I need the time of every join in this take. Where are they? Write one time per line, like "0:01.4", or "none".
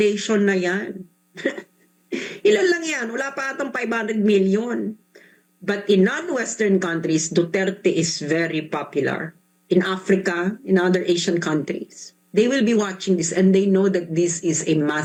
none